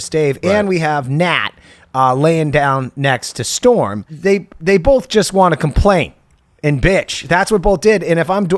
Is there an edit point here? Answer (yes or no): yes